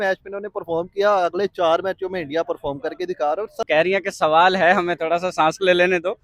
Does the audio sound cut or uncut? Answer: cut